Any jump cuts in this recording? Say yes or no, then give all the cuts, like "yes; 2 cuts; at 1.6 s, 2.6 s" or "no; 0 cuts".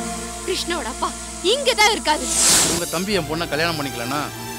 yes; 1 cut; at 2.8 s